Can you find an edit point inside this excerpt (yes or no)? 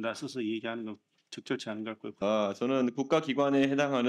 yes